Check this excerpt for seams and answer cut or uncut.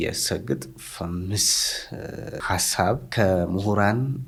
uncut